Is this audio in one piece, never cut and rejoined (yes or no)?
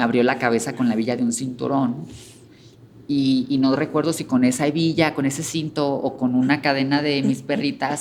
yes